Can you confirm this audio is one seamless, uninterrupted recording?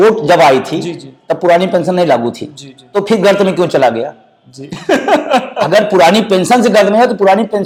yes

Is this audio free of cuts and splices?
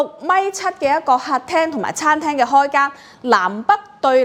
yes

